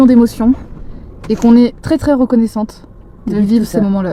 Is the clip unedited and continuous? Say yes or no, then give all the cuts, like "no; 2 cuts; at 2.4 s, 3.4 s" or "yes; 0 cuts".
yes; 0 cuts